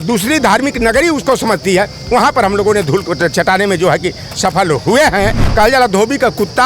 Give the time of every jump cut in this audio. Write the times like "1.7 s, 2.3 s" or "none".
5.4 s